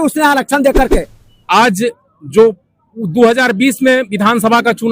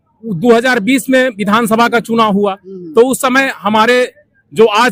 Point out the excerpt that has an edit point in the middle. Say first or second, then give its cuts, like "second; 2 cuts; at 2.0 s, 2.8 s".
first; 1 cut; at 1.2 s